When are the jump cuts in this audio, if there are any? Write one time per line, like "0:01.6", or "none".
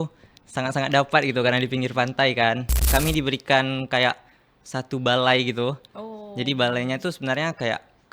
0:02.7